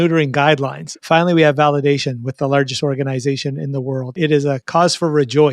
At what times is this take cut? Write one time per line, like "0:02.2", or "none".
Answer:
0:00.9
0:04.4

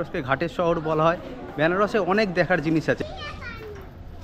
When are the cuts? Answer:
none

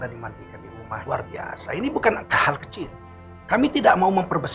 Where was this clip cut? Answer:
0:01.0

